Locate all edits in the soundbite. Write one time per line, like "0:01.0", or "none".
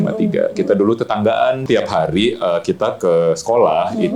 0:01.6